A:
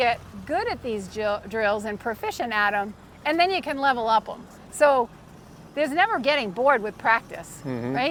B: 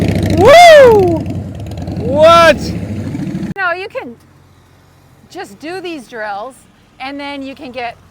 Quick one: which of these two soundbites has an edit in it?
B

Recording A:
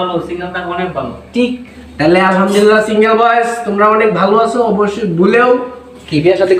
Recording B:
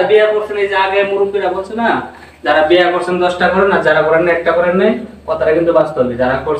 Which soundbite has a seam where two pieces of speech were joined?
A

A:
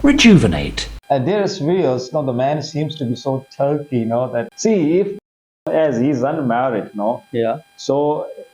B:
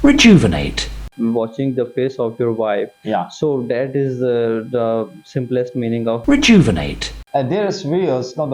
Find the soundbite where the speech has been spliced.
B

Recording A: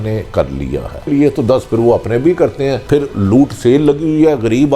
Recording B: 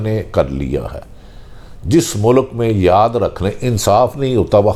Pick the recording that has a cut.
A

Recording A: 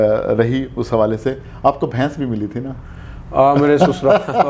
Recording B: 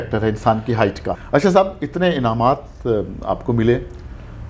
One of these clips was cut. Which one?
B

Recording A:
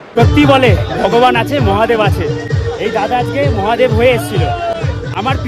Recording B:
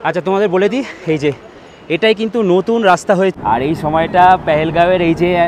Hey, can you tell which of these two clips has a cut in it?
B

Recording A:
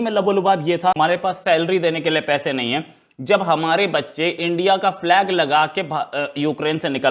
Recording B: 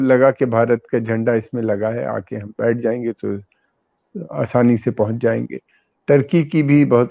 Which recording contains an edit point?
A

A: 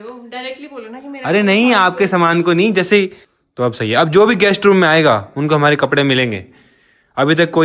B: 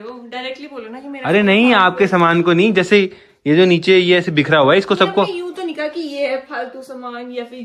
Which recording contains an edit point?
A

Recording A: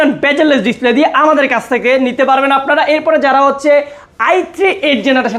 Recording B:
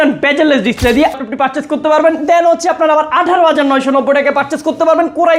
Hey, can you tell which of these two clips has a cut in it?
B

